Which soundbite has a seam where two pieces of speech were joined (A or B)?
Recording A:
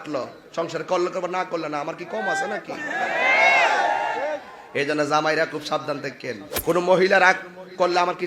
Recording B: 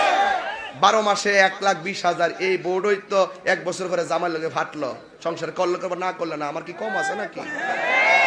A